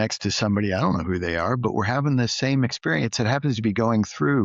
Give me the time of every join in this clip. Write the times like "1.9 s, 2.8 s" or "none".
none